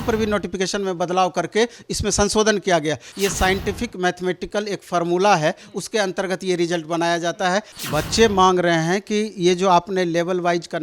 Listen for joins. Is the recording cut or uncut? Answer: cut